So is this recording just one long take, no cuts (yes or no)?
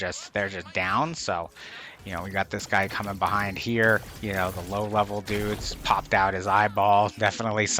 yes